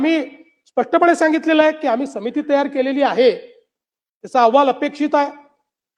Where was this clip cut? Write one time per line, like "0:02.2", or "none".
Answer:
none